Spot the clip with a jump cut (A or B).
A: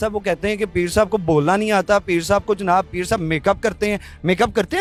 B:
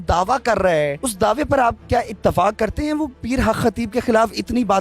B